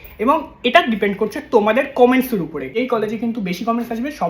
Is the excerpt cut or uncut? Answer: cut